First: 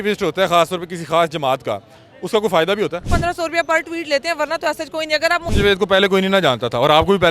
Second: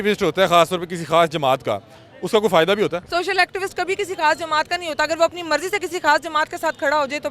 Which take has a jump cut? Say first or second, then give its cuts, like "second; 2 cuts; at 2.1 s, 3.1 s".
first; 2 cuts; at 3.1 s, 5.5 s